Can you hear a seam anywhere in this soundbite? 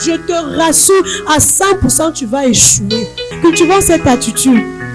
yes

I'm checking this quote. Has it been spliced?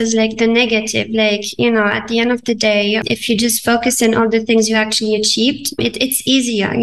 yes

